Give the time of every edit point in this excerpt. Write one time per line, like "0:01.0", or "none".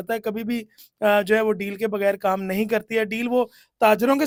none

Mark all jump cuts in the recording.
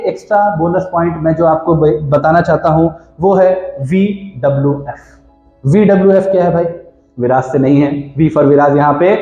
none

